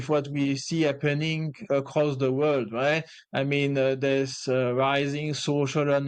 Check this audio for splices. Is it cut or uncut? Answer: uncut